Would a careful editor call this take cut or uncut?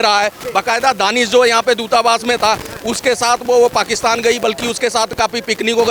uncut